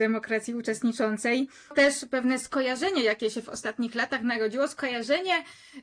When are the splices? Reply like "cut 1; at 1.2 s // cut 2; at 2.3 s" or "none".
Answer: cut 1; at 1.7 s